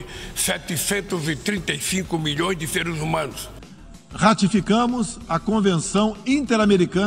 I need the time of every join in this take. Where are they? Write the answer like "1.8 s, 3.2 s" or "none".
3.9 s

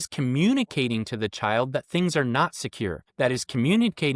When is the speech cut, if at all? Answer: 3.0 s

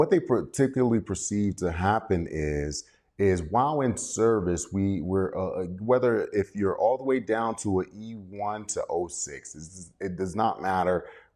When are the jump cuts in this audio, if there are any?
none

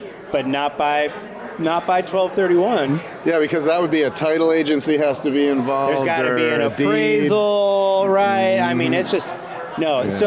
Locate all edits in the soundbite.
none

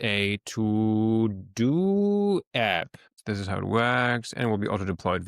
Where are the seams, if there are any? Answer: 3.1 s

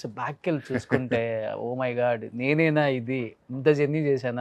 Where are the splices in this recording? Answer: none

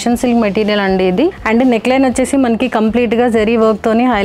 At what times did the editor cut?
1.4 s

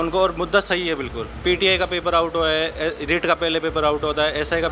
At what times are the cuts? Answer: 1.4 s

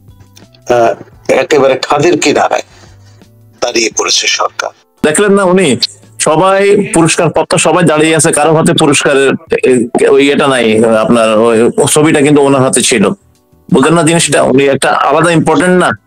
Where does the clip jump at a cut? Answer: 5.0 s

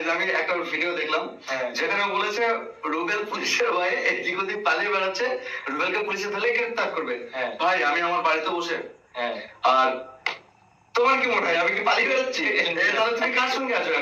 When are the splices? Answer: none

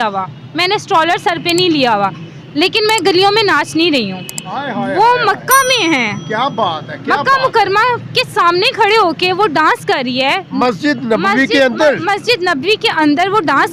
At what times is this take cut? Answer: none

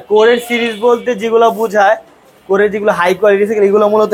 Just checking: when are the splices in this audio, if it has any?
none

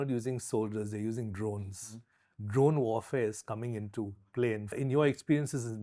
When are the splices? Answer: 4.7 s

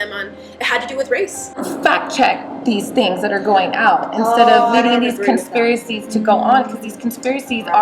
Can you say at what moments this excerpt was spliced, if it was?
1.6 s

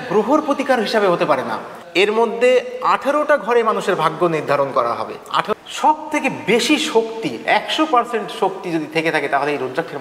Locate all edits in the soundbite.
1.7 s, 5.5 s

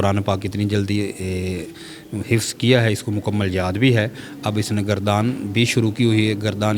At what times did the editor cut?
none

